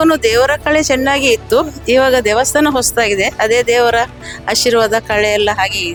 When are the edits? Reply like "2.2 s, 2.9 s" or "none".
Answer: none

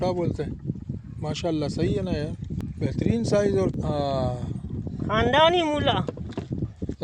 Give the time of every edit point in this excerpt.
2.6 s, 3.7 s

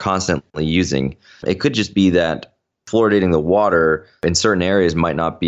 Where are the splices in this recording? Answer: 1.4 s, 2.8 s, 4.2 s

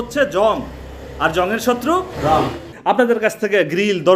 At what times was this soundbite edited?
2.7 s

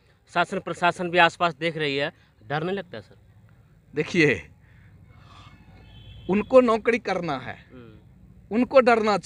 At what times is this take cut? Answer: none

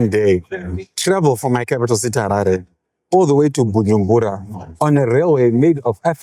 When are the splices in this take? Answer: none

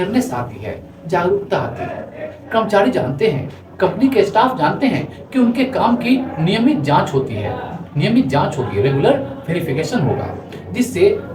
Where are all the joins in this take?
none

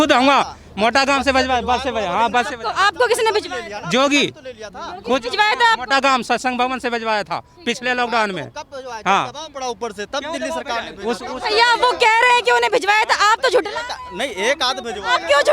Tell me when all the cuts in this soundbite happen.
none

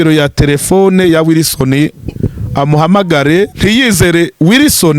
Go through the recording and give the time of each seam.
3.5 s

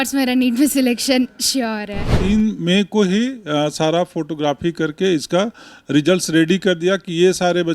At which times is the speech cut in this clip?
2.1 s

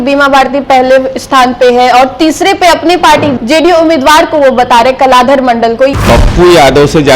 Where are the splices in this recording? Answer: 5.9 s

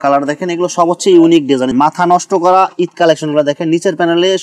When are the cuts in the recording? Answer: 1.7 s

